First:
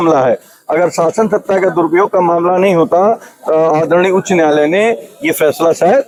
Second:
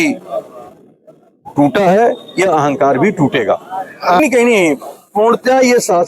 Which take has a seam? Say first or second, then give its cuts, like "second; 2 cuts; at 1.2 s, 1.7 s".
second; 1 cut; at 4.2 s